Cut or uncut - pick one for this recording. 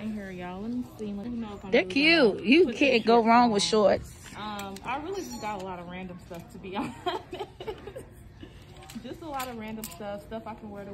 cut